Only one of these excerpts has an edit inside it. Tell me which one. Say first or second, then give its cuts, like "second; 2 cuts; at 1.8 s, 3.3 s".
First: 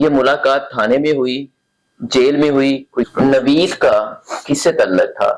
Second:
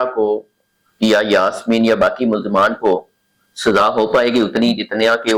first; 1 cut; at 3.1 s